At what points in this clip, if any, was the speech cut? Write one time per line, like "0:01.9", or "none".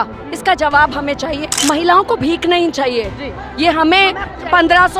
0:01.5